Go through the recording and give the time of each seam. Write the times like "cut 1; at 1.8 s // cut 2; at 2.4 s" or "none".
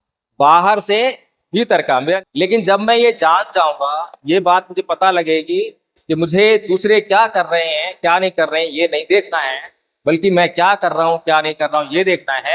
cut 1; at 2.2 s